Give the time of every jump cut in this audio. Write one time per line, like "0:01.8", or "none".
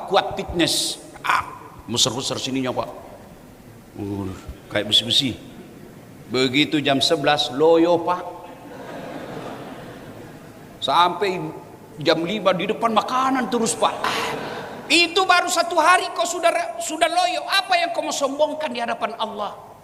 none